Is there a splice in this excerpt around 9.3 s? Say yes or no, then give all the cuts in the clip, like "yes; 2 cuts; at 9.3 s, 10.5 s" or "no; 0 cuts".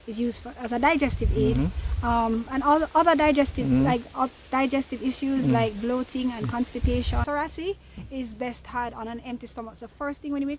no; 1 cut; at 7.2 s